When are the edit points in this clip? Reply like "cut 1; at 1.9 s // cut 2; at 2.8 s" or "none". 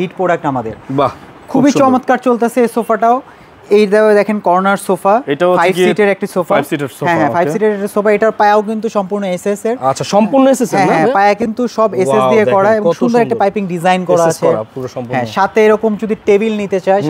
none